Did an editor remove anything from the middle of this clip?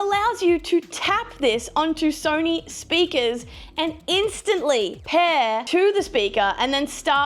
yes; 2 cuts; at 5.0 s, 5.6 s

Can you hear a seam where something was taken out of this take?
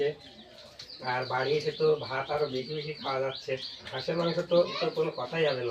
yes; 2 cuts; at 3.9 s, 4.7 s

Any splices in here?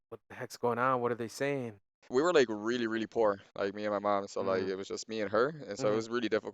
yes; 1 cut; at 2.0 s

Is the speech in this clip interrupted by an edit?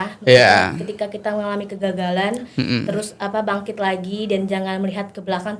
no; 0 cuts

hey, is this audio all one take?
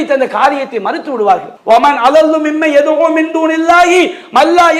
no; 1 cut; at 1.5 s

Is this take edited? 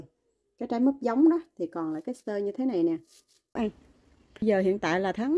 yes; 1 cut; at 3.5 s

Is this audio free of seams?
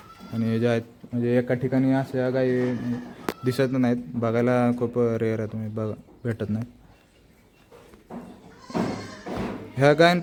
yes; 0 cuts

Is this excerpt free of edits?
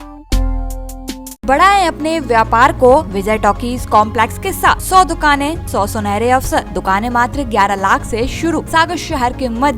no; 6 cuts; at 1.4 s, 3.1 s, 4.8 s, 5.6 s, 6.7 s, 8.7 s

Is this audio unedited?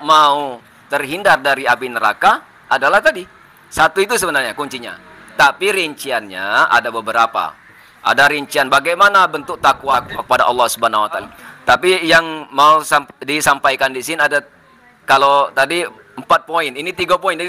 no; 2 cuts; at 9.9 s, 11.3 s

